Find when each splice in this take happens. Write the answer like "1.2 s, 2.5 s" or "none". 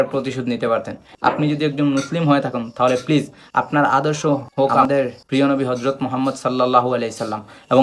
1.0 s